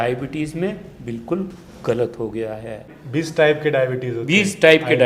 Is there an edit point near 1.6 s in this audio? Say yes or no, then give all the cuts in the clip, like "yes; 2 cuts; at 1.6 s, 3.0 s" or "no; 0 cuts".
no; 1 cut; at 3.0 s